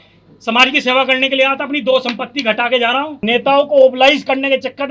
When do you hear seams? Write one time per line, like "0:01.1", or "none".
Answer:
0:03.2